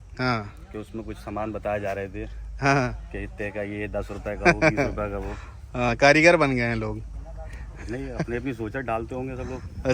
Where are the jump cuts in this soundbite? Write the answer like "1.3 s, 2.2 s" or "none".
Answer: none